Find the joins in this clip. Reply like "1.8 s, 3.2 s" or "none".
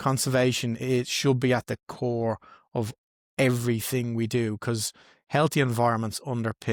none